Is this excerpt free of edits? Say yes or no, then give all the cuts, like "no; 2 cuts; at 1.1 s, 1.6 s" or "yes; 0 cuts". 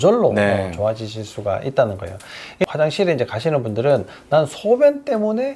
no; 1 cut; at 2.6 s